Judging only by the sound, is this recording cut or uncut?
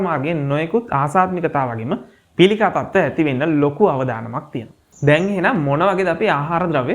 cut